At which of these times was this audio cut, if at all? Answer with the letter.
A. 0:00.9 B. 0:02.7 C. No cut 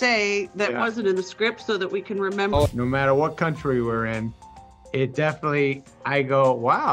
B